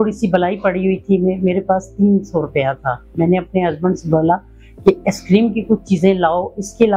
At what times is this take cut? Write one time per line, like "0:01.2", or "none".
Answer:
none